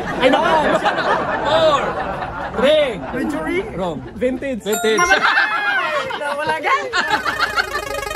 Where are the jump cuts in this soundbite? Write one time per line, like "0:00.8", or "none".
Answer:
none